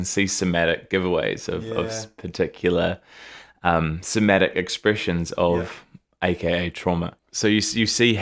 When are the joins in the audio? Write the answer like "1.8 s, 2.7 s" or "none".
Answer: 7.2 s